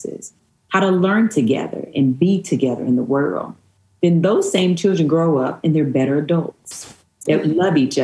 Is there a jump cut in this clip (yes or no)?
no